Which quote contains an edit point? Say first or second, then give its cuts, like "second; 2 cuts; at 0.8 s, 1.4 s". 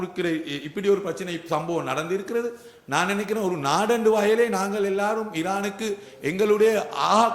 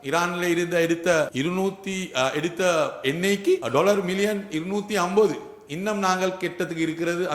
second; 2 cuts; at 1.3 s, 3.6 s